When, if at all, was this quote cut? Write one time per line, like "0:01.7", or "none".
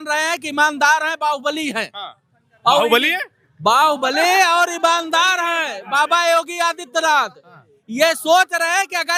none